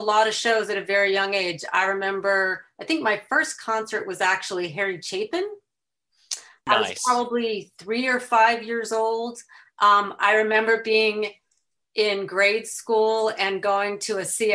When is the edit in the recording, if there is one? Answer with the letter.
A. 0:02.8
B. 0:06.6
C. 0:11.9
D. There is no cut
B